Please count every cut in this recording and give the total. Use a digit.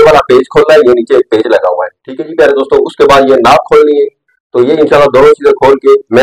0